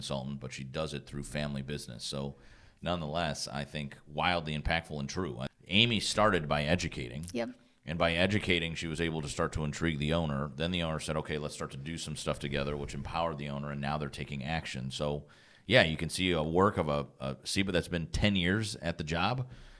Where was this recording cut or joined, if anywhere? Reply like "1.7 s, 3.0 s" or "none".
5.5 s

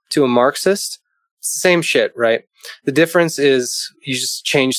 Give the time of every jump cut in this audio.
none

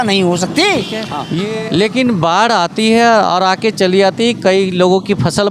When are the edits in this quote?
1.2 s

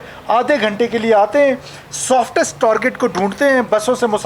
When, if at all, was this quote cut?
none

